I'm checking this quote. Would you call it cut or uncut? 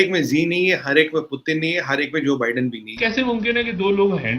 cut